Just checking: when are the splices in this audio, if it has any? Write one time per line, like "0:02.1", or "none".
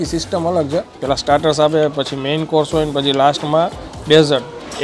0:00.9